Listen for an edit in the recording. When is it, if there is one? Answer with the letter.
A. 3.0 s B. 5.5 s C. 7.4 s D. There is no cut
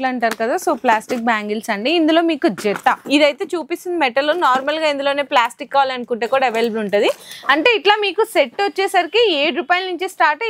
A